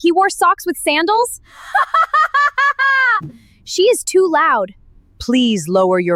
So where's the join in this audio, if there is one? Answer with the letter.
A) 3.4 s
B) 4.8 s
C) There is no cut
C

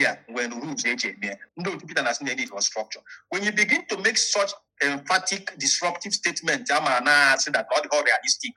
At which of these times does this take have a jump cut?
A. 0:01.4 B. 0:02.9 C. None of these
A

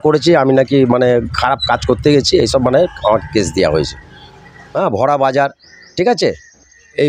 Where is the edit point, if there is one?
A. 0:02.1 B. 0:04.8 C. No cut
B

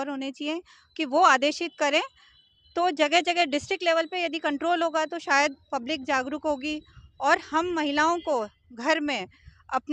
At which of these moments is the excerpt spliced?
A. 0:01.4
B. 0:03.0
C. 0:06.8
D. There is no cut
D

